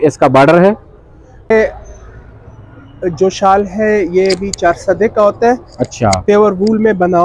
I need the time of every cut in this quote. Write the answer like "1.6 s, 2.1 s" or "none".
1.5 s